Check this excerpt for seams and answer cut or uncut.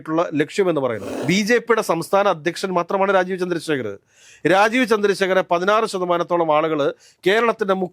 cut